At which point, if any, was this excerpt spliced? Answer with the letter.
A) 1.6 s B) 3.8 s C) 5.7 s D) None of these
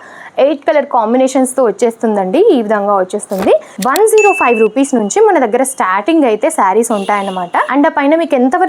B